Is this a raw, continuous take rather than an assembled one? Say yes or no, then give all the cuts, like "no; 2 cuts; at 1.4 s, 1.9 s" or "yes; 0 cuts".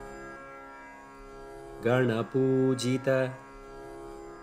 no; 2 cuts; at 1.8 s, 3.4 s